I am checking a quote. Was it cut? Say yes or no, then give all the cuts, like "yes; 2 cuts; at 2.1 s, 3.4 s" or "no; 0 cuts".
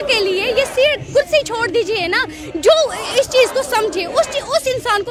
no; 0 cuts